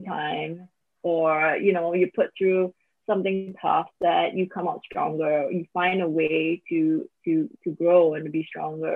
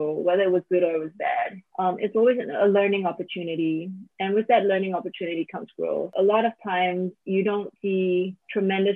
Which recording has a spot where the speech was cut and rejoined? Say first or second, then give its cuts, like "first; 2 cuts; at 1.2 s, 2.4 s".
second; 4 cuts; at 1.6 s, 6.1 s, 7.2 s, 7.9 s